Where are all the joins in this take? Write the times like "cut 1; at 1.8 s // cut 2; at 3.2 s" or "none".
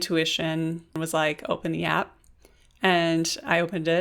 cut 1; at 0.9 s